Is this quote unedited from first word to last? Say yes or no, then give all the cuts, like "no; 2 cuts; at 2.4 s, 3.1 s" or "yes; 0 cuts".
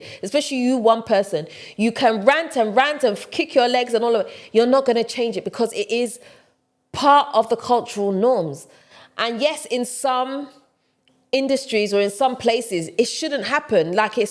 yes; 0 cuts